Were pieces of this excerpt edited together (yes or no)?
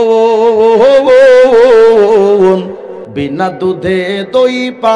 yes